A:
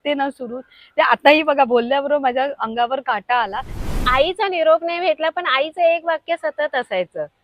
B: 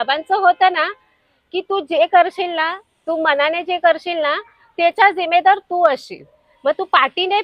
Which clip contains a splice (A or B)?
A